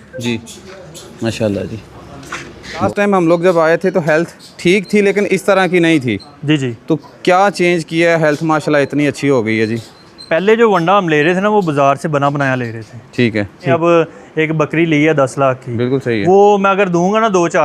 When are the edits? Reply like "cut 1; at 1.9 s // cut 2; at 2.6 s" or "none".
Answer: cut 1; at 2.8 s // cut 2; at 13.7 s